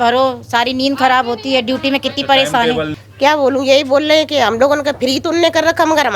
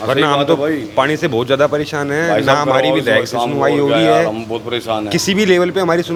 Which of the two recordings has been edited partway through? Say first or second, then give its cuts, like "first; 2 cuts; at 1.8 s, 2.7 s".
first; 1 cut; at 3.0 s